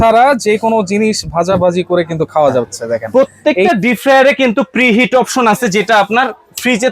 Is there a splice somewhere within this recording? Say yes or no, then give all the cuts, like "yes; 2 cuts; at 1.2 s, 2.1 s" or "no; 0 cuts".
yes; 1 cut; at 3.1 s